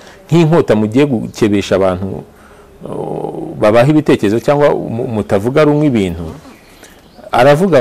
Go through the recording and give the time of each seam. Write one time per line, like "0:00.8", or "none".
none